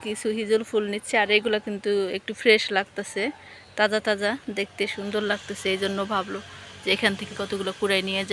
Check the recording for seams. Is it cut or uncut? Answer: uncut